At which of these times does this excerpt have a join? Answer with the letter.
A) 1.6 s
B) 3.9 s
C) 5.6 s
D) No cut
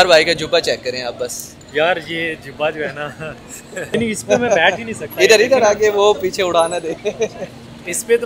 B